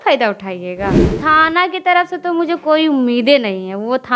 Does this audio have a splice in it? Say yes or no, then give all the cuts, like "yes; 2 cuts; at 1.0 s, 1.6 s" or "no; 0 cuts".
yes; 1 cut; at 1.1 s